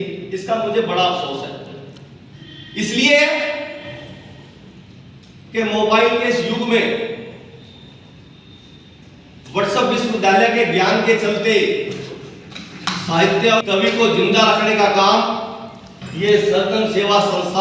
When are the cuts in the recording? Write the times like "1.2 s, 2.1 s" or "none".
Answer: 13.6 s